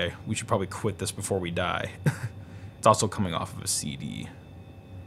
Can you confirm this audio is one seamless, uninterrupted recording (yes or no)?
yes